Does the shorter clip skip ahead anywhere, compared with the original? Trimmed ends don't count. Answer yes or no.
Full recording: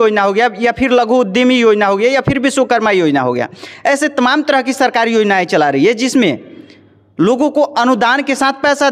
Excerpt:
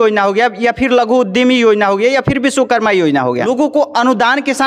yes